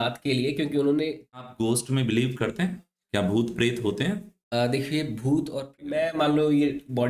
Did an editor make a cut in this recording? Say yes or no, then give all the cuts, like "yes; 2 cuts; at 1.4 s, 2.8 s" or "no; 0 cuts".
yes; 2 cuts; at 1.4 s, 5.8 s